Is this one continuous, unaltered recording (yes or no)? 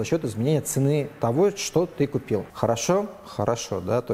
no